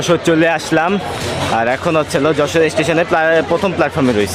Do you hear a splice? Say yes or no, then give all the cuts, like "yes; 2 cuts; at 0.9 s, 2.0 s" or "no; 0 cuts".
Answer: no; 0 cuts